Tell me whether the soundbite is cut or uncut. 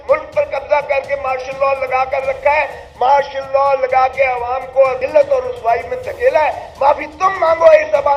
cut